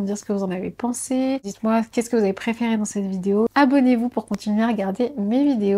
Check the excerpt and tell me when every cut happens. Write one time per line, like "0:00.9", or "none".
0:01.5
0:03.5